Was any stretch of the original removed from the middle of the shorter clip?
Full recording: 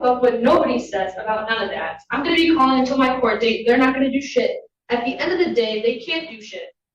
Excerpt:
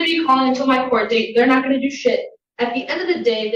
no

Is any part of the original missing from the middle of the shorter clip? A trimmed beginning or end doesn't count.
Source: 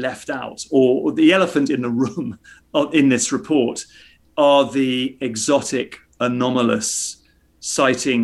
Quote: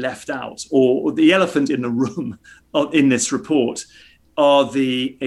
no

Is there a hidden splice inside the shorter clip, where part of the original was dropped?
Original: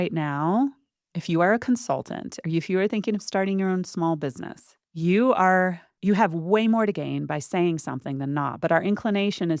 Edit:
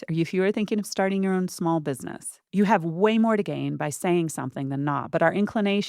yes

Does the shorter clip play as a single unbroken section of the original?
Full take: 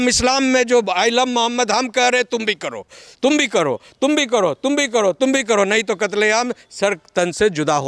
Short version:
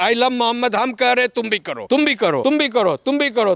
no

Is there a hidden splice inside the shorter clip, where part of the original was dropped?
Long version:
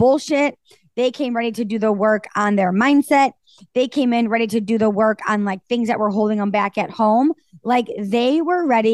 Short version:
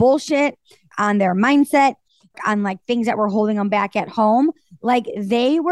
yes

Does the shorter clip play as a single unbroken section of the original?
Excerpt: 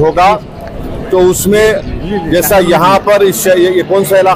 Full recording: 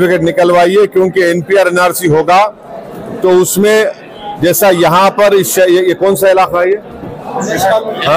yes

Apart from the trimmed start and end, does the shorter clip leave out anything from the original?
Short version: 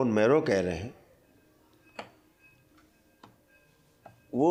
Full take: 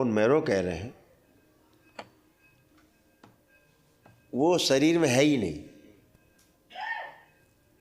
no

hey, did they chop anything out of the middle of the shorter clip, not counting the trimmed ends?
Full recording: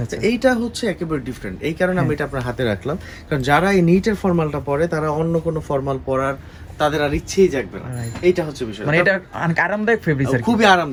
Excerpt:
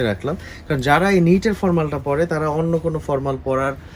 no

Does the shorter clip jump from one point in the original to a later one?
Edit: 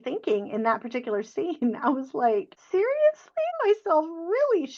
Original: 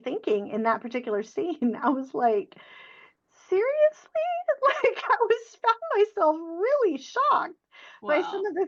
yes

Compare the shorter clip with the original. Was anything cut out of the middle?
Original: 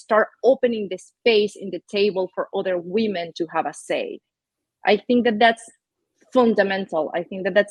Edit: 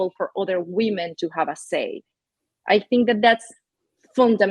no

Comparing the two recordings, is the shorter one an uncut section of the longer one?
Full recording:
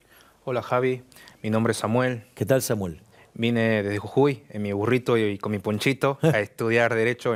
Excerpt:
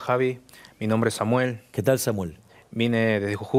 yes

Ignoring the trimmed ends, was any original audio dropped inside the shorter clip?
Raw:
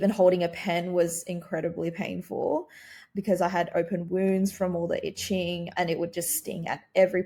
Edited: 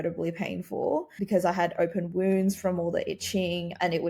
yes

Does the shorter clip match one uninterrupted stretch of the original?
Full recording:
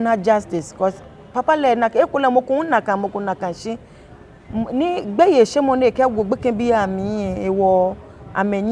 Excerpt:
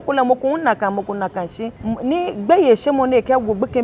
no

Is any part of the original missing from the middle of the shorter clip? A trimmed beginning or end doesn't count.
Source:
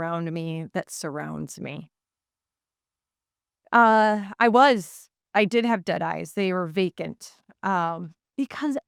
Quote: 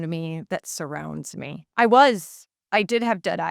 yes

